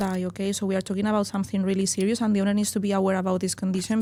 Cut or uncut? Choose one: uncut